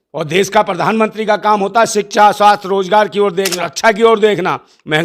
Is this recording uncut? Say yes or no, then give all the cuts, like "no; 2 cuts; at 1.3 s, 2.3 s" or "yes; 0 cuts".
no; 1 cut; at 3.6 s